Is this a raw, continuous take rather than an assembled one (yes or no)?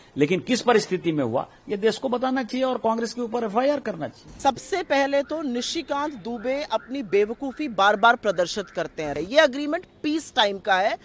no